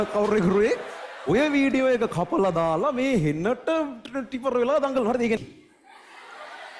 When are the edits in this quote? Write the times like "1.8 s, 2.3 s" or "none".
5.4 s